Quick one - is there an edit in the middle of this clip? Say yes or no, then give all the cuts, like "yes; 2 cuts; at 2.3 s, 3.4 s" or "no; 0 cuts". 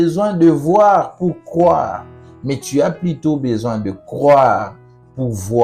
no; 0 cuts